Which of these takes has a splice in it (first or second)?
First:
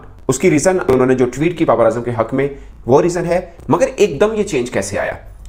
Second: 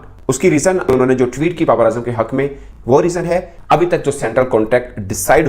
second